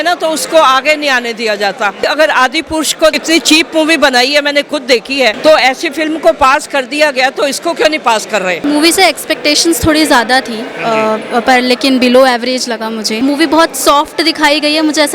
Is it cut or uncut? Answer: cut